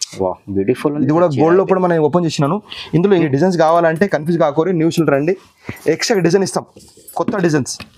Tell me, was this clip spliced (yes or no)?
yes